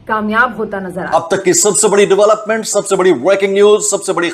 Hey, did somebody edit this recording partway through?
yes; 1 cut; at 1.1 s

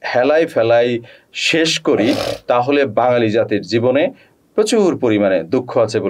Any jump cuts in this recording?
no; 0 cuts

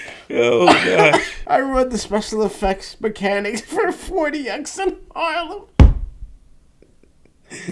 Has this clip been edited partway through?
yes; 1 cut; at 1.3 s

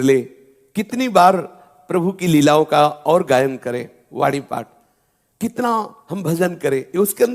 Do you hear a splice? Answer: no; 0 cuts

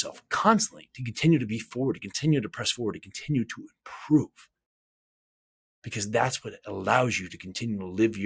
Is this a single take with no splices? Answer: yes; 0 cuts

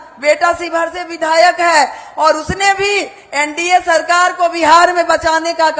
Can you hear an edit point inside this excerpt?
no; 0 cuts

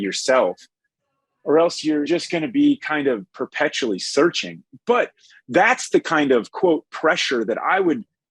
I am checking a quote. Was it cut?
yes; 1 cut; at 2.0 s

